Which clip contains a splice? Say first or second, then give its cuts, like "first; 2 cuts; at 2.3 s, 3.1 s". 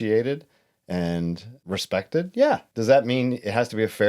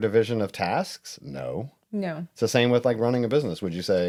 first; 2 cuts; at 1.6 s, 2.7 s